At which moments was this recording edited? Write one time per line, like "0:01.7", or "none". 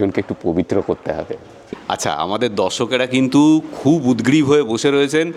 0:01.7